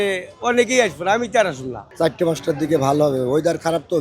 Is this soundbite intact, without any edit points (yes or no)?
no